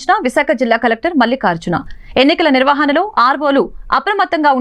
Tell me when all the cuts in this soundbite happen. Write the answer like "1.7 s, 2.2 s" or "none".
none

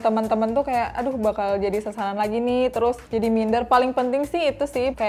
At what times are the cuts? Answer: none

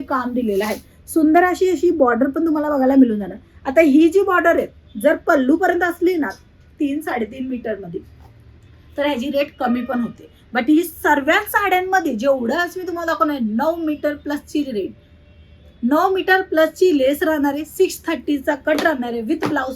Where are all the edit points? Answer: none

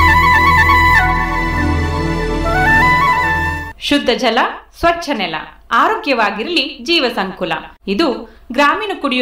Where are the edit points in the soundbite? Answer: 3.6 s

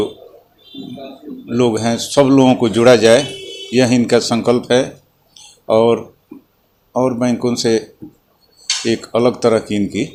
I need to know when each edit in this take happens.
none

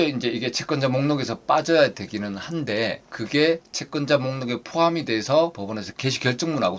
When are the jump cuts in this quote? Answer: 5.6 s

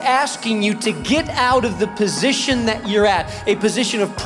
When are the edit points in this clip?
none

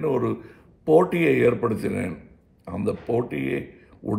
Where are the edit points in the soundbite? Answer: none

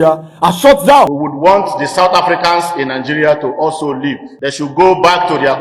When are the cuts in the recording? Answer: 1.1 s, 4.3 s

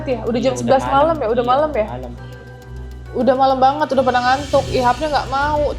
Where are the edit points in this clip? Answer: none

